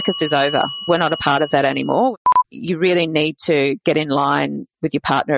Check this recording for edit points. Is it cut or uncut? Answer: cut